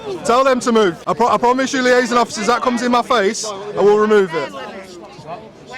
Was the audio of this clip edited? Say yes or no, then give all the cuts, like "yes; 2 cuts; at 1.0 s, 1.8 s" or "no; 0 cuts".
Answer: yes; 1 cut; at 1.0 s